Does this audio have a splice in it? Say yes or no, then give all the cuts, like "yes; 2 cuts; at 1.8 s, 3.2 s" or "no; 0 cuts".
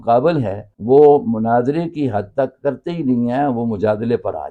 no; 0 cuts